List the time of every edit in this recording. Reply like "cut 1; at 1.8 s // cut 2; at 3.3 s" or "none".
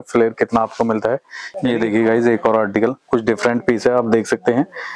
cut 1; at 1.4 s